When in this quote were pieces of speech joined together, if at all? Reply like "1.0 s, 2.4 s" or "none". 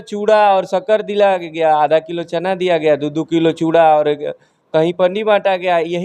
none